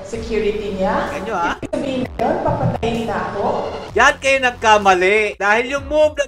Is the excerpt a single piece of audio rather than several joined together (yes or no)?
no